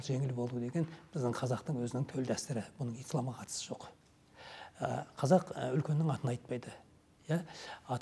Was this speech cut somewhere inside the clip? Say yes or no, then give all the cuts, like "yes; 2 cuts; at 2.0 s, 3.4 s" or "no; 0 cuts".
no; 0 cuts